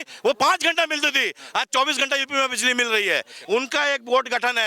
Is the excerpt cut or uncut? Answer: cut